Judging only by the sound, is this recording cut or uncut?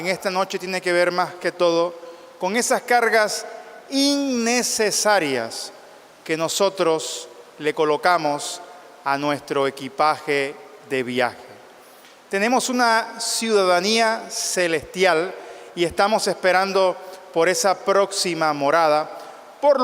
cut